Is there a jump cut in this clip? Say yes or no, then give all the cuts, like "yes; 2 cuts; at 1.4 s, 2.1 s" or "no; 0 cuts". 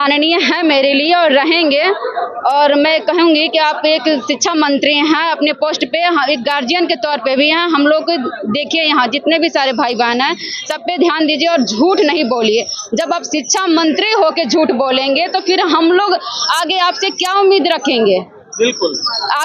no; 0 cuts